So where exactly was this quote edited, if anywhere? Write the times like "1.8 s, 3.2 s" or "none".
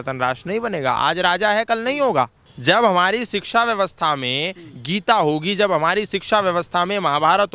2.4 s